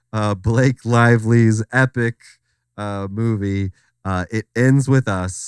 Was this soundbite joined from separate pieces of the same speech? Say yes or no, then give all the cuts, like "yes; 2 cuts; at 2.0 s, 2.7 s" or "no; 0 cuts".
no; 0 cuts